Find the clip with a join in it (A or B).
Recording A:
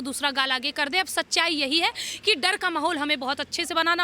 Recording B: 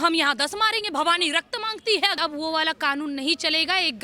B